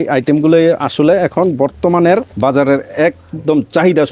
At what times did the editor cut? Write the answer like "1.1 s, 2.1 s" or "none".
2.3 s

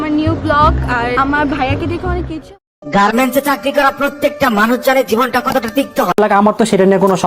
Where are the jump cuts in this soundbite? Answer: 2.4 s

